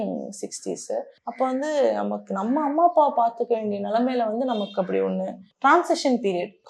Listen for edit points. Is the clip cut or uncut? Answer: cut